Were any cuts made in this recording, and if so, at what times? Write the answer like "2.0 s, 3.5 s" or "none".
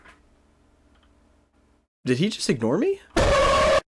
1.9 s, 3.0 s